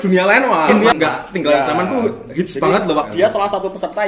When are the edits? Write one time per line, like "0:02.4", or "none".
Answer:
0:00.9
0:03.1

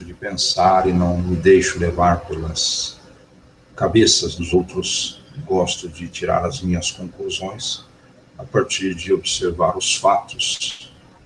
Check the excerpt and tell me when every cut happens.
none

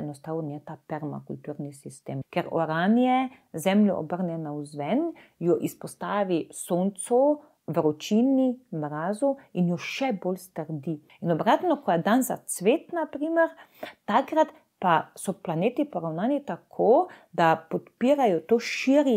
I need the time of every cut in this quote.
0:02.1
0:11.1

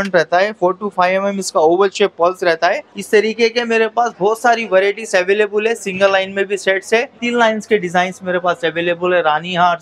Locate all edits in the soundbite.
0:02.9
0:07.2

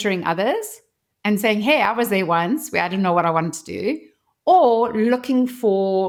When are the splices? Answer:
none

